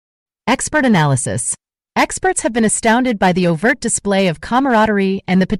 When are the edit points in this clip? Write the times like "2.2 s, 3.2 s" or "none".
none